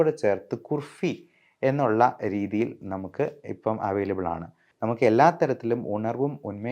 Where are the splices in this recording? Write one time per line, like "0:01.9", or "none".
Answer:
0:04.6